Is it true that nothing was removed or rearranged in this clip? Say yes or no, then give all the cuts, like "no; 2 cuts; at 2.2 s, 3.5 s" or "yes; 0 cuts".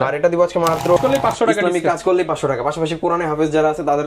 no; 1 cut; at 1.0 s